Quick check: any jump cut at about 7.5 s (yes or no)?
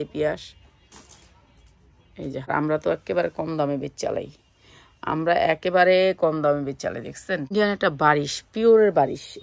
yes